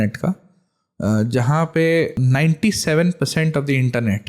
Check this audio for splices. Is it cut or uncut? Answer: cut